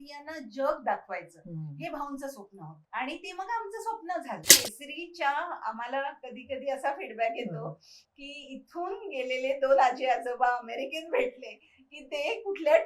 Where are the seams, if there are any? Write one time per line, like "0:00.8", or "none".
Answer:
0:02.8
0:04.5